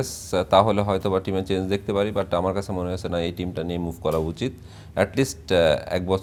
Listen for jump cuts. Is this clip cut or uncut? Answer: uncut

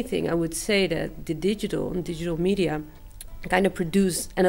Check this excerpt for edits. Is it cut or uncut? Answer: uncut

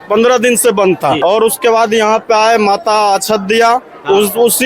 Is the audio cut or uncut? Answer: cut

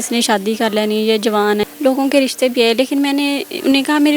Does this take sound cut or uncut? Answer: cut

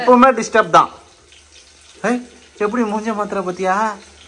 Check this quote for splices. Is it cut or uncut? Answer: uncut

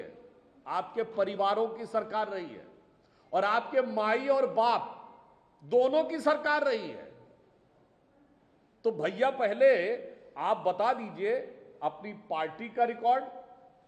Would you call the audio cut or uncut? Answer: uncut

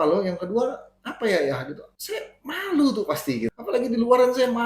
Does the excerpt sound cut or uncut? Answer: cut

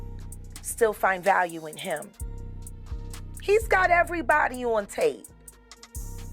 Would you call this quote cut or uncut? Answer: cut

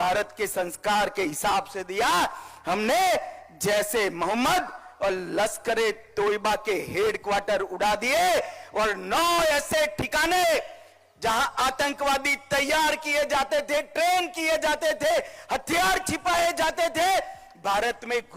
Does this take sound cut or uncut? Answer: uncut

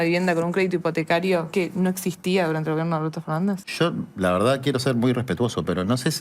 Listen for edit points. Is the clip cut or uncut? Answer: cut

